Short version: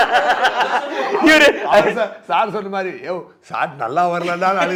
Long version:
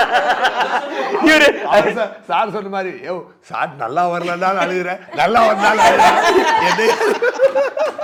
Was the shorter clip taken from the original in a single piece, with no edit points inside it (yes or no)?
yes